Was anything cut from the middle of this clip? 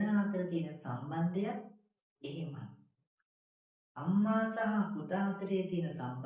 no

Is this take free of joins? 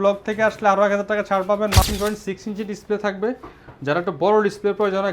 no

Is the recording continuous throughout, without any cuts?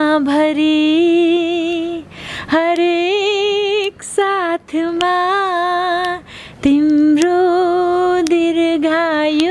yes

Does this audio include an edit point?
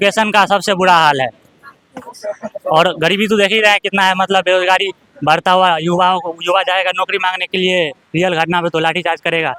no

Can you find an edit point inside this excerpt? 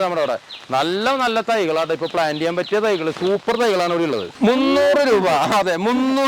yes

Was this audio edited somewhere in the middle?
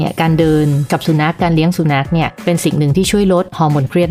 no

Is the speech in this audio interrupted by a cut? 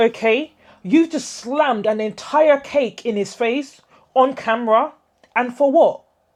no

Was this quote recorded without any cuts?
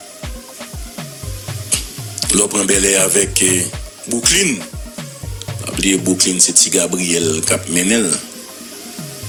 yes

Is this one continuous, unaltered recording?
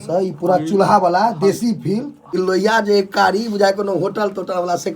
no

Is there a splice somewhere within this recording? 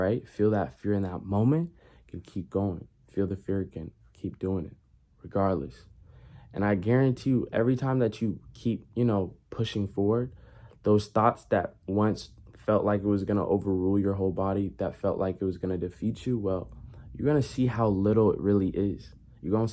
no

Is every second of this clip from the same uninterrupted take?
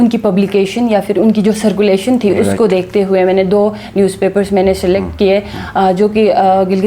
yes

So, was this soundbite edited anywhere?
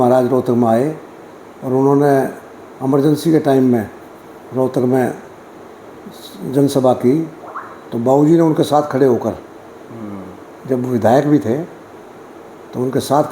no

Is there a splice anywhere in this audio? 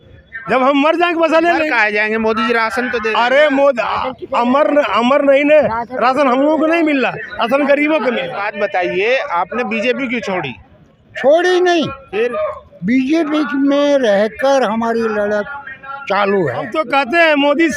yes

